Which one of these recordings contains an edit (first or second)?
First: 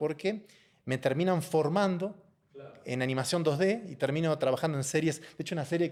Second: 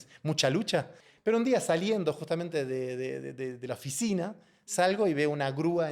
second